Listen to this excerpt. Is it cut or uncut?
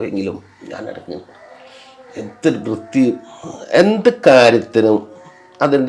uncut